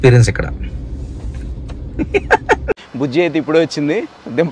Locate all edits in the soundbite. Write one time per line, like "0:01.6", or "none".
0:02.8

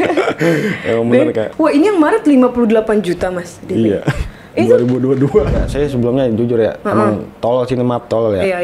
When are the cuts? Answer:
0:01.5
0:05.6

